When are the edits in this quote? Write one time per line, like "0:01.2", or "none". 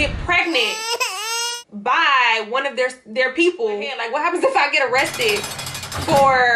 none